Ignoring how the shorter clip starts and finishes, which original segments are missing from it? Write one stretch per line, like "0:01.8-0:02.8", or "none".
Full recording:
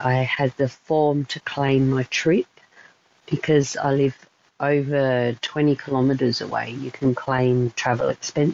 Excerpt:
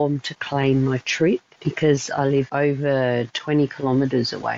0:02.6-0:03.2
0:04.2-0:04.6

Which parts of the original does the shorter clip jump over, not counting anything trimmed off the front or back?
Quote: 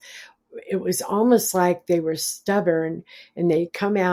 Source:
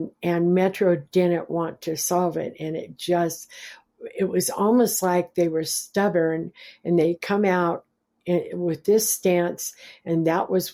none

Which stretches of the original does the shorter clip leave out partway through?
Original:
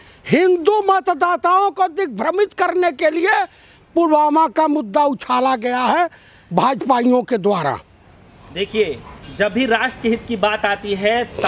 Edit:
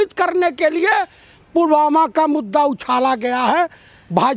none

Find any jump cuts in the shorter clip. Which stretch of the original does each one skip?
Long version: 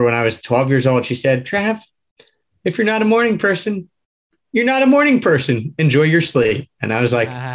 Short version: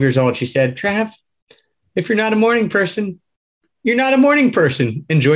none

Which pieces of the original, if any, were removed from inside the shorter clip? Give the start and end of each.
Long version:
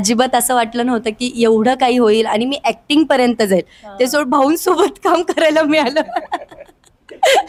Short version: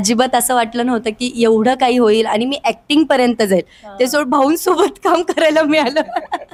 none

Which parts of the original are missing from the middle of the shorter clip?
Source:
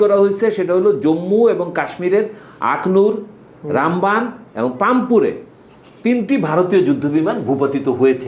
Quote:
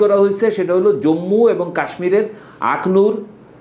none

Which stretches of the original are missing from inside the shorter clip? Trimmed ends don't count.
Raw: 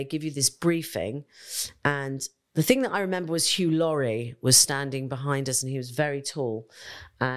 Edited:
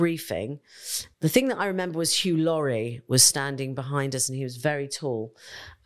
0:01.6-0:02.3

